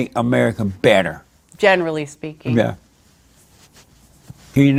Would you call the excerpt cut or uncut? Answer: uncut